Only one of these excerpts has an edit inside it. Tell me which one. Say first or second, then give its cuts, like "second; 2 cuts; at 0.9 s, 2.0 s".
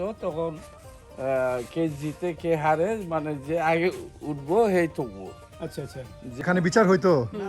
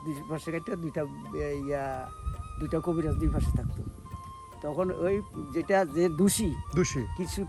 first; 1 cut; at 6.4 s